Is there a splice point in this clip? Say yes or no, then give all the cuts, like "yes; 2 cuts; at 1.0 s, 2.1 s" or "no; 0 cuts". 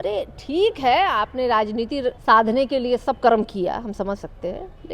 yes; 1 cut; at 2.2 s